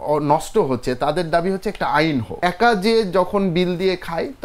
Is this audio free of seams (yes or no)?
no